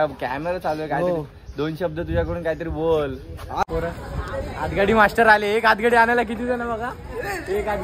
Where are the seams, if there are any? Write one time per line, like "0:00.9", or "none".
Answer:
0:03.6

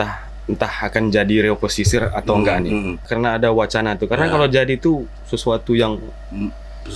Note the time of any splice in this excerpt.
0:03.1

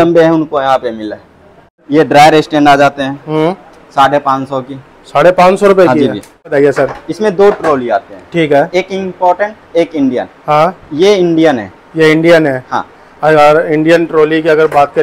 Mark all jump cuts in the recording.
0:01.8
0:06.5

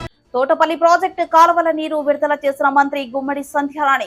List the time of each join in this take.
none

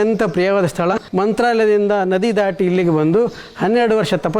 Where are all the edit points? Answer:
0:00.9

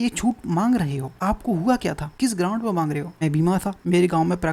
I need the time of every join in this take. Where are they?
0:01.1
0:02.1
0:03.5

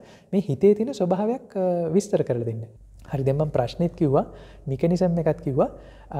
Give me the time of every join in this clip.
0:02.7

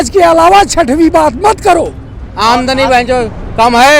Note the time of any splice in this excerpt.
0:02.3

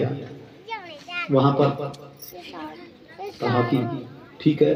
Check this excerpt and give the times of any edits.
none

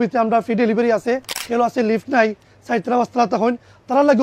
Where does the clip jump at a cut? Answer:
0:01.3

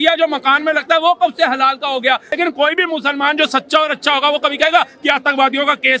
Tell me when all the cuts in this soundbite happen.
0:02.4

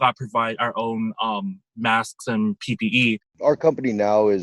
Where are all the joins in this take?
0:03.3

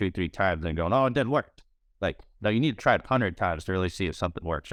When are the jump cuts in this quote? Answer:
none

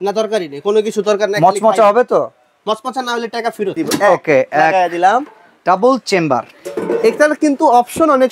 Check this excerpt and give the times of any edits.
0:03.8

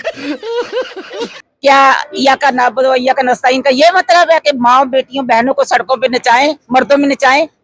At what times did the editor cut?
0:01.4

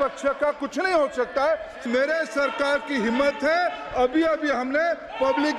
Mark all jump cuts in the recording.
0:01.8

